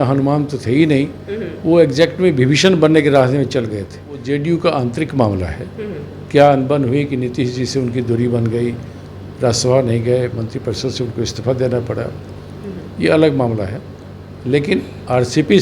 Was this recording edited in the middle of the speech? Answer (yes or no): yes